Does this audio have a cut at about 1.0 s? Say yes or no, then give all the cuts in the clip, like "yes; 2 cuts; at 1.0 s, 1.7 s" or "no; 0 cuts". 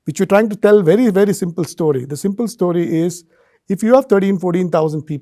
no; 0 cuts